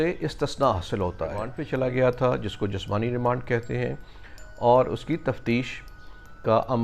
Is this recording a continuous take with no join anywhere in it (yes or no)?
no